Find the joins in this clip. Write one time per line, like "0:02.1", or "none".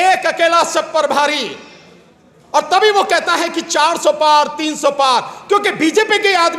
none